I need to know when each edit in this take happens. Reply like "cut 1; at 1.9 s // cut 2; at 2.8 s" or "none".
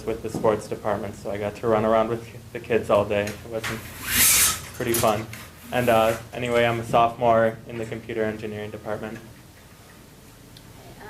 cut 1; at 6.7 s